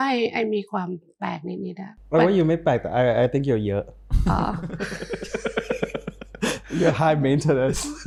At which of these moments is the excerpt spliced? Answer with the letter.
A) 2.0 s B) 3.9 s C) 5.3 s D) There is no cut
D